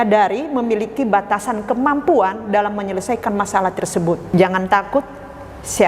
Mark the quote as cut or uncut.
cut